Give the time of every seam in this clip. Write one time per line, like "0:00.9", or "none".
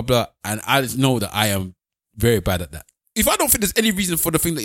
0:03.0